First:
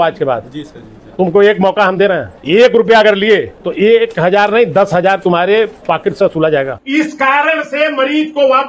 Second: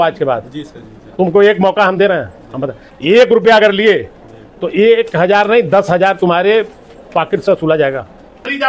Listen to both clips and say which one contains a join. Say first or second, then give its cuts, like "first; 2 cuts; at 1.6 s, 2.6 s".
first; 4 cuts; at 2.3 s, 3.6 s, 5.8 s, 6.8 s